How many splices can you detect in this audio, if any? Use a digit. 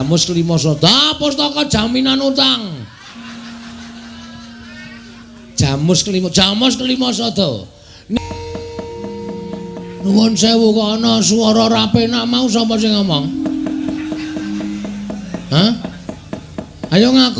1